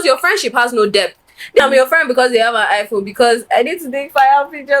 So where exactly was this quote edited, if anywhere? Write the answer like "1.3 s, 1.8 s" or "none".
1.6 s